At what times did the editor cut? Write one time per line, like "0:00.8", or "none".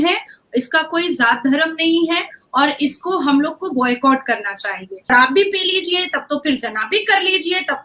0:05.1